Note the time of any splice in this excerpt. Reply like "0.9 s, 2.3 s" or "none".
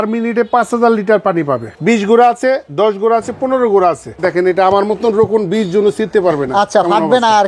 1.7 s, 4.1 s